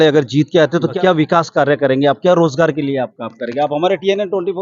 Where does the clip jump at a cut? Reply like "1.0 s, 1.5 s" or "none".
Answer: 0.9 s